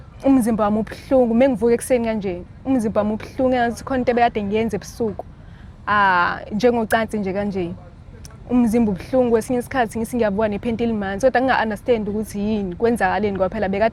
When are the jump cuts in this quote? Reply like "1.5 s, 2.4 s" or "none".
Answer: none